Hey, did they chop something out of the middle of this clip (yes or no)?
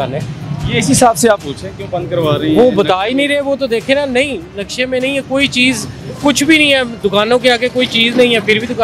no